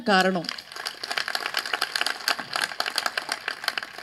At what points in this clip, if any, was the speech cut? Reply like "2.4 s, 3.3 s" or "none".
none